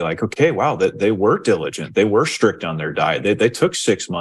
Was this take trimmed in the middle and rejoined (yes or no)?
no